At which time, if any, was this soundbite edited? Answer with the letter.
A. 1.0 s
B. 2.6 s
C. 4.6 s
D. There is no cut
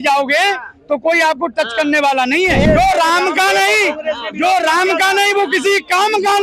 B